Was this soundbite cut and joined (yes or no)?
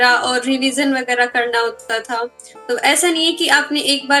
no